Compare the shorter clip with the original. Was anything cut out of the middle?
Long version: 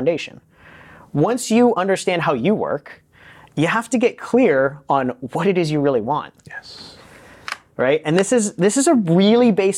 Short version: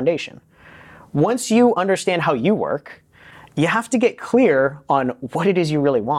no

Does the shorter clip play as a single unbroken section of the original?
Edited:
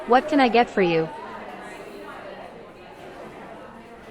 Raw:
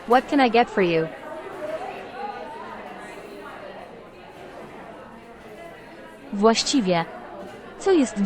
no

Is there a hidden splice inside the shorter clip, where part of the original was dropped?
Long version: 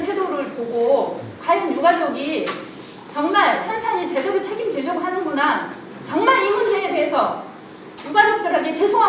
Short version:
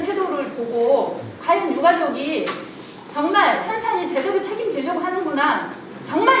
no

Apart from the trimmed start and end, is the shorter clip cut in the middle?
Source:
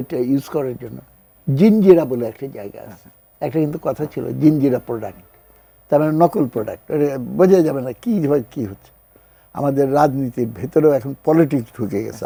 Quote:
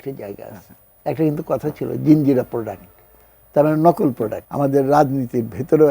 yes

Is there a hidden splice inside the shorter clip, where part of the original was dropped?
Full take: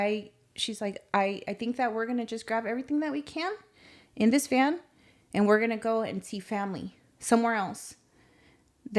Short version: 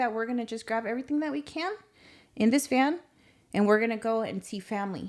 no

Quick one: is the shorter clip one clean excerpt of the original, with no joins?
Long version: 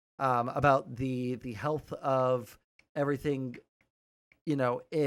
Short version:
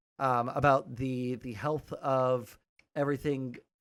yes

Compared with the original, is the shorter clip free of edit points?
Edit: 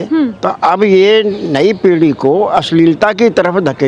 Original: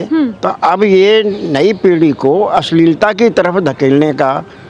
yes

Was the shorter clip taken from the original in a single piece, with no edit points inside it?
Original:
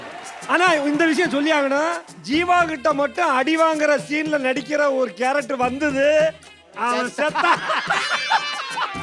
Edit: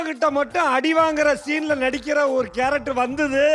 yes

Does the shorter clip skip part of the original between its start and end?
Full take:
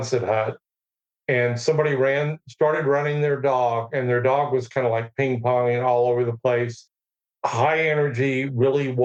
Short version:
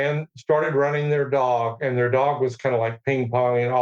no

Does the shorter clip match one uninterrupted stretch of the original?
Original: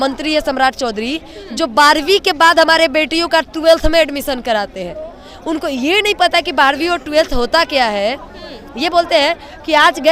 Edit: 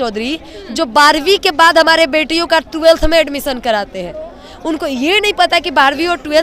yes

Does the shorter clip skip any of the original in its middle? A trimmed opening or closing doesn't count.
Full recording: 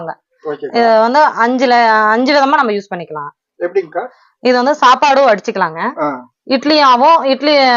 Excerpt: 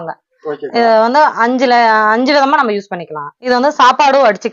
yes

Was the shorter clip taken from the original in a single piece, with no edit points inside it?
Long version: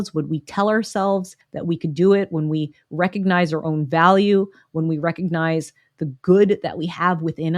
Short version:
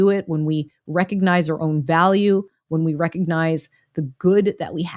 yes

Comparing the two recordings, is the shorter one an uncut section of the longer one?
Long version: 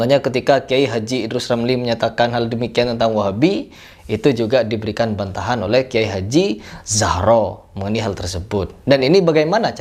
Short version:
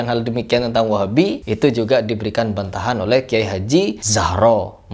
no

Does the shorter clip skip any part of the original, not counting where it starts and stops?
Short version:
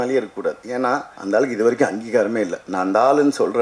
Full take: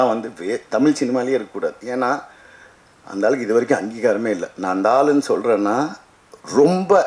yes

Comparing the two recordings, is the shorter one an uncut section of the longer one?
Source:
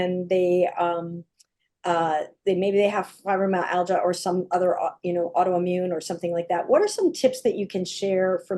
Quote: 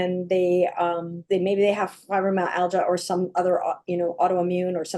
no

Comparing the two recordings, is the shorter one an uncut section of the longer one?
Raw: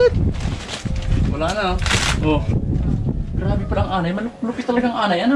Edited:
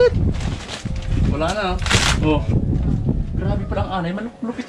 yes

